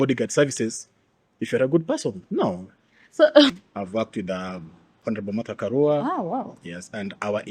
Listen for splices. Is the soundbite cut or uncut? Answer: cut